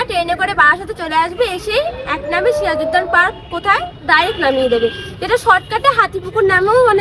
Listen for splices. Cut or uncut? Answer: uncut